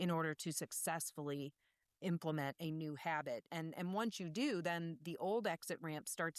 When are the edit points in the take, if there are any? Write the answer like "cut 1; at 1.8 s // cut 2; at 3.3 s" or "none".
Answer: none